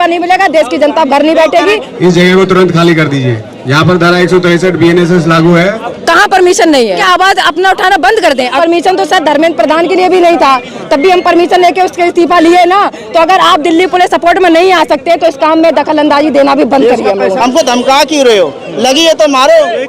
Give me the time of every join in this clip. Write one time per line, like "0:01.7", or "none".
0:01.9
0:05.9
0:07.0
0:08.6
0:17.4